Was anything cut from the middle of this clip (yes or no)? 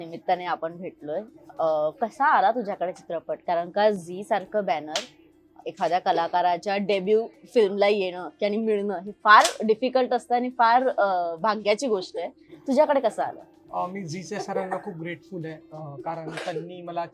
no